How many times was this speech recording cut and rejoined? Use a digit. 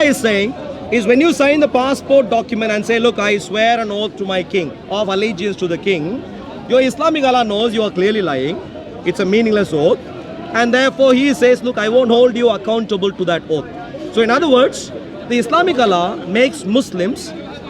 0